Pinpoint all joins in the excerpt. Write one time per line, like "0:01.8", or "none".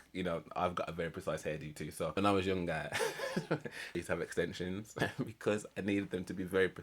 0:02.2
0:03.9
0:04.9